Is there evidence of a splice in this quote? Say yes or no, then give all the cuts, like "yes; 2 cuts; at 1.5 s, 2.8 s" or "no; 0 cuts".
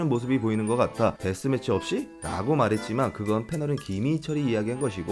yes; 1 cut; at 1.2 s